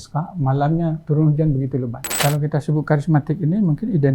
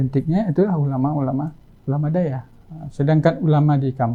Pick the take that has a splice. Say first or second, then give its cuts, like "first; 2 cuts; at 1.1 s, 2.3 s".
first; 2 cuts; at 1.0 s, 2.1 s